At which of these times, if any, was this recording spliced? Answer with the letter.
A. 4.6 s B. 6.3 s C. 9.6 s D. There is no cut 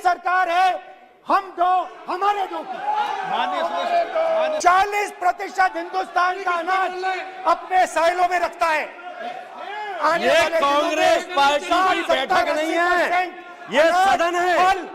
A